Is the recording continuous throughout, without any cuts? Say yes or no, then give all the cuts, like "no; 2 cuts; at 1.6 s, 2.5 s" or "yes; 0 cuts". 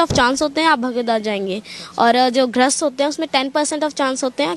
yes; 0 cuts